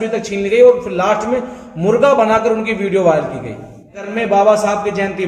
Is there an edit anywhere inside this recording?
yes; 1 cut; at 4.1 s

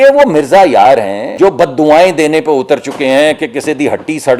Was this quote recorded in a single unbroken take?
no; 1 cut; at 1.2 s

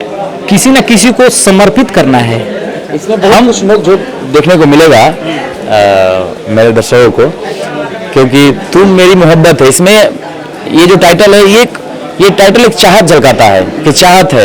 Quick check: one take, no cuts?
yes; 0 cuts

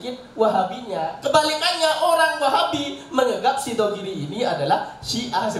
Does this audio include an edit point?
no; 0 cuts

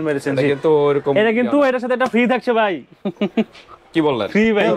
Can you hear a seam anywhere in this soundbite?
no; 0 cuts

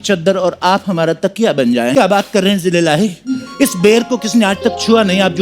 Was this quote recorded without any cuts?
no; 1 cut; at 1.9 s

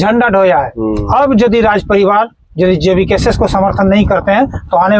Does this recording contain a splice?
no; 0 cuts

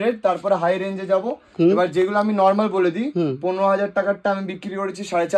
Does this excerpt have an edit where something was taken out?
no; 0 cuts

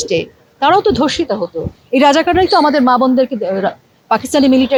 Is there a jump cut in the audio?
no; 0 cuts

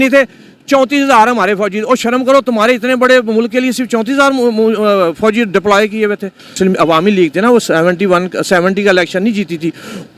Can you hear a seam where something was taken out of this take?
yes; 1 cut; at 6.6 s

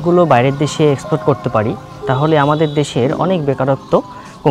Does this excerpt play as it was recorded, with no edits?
yes; 0 cuts

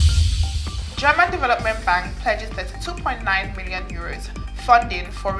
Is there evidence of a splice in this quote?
yes; 1 cut; at 0.9 s

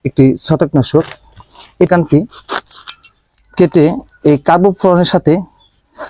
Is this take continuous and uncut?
no; 1 cut; at 1.9 s

